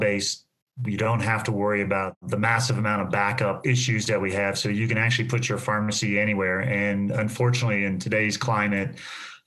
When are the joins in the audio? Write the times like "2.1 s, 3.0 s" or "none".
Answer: 2.2 s, 3.6 s